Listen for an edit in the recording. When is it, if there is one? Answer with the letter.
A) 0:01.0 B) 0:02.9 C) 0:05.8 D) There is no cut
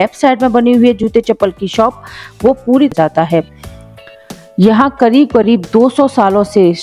B